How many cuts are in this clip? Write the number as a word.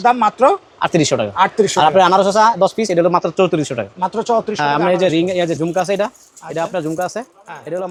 zero